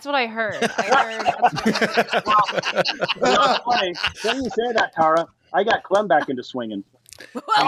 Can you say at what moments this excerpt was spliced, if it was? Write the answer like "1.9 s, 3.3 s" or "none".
none